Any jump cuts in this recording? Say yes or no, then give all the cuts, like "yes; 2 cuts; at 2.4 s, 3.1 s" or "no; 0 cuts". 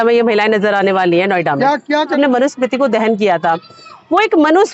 yes; 1 cut; at 2.2 s